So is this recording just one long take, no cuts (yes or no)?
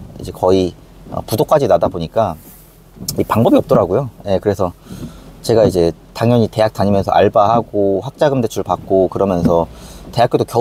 yes